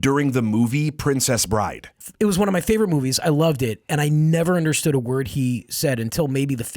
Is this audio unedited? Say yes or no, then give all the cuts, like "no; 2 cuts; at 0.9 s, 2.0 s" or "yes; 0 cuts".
no; 1 cut; at 1.9 s